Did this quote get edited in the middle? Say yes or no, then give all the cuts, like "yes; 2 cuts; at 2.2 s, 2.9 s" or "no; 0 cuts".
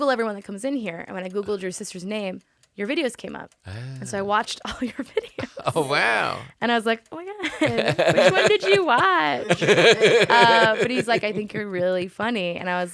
no; 0 cuts